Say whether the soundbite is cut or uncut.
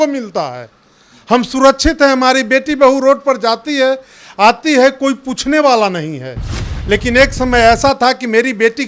uncut